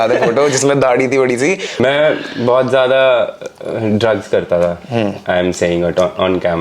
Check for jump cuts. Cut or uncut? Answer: cut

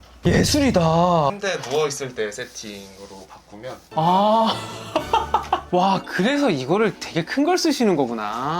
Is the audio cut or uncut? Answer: cut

